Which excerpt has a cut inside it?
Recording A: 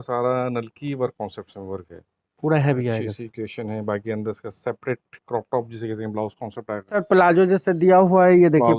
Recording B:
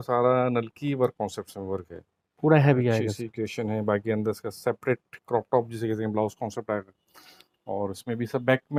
A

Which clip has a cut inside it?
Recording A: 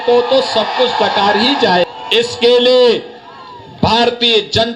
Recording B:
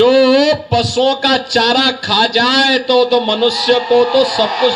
A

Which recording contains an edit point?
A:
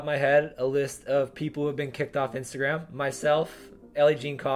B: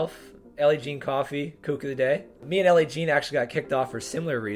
B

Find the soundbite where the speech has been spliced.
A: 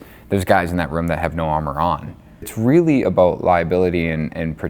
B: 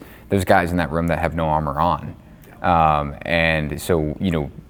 A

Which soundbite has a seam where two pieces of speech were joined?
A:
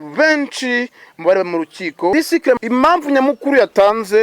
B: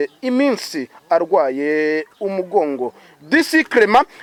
A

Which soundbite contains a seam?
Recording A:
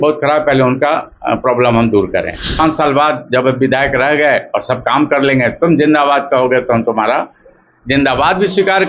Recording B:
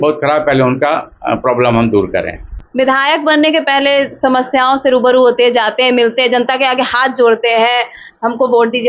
A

